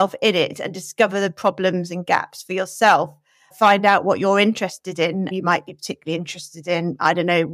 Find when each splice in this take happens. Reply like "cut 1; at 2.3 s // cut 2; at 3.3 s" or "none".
cut 1; at 3.5 s // cut 2; at 5.3 s